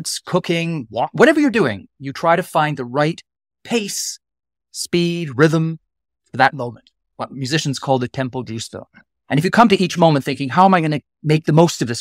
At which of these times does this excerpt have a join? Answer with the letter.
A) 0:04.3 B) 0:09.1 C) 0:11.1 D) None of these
C